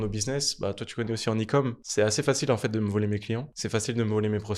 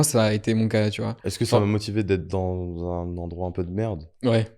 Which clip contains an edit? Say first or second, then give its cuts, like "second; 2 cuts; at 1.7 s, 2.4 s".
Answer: first; 2 cuts; at 1.8 s, 3.5 s